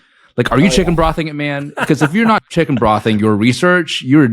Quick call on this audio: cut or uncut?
cut